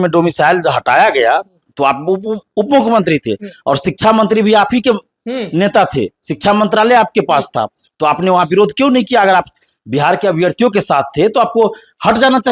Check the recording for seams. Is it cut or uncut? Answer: uncut